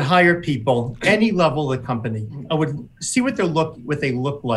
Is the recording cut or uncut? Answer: cut